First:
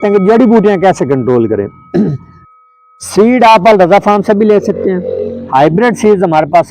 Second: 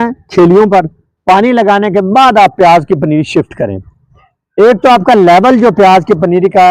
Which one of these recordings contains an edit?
first; 1 cut; at 2.3 s

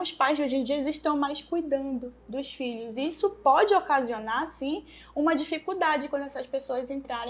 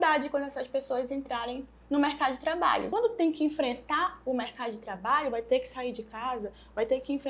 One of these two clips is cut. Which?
second; 1 cut; at 2.9 s

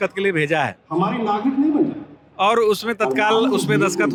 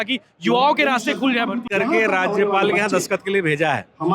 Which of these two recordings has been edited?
second; 1 cut; at 1.6 s

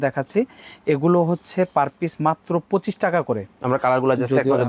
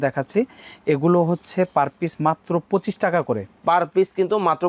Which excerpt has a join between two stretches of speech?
first; 1 cut; at 3.6 s

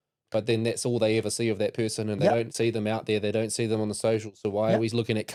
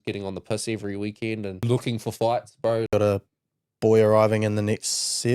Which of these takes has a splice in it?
second; 2 cuts; at 1.6 s, 2.9 s

